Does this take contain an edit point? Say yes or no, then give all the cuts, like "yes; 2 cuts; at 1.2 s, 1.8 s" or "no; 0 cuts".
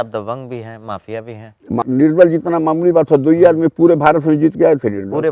yes; 1 cut; at 1.8 s